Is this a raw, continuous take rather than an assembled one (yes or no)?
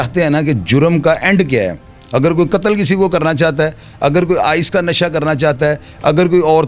yes